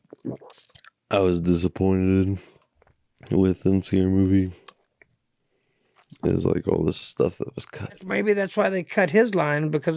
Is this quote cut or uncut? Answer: cut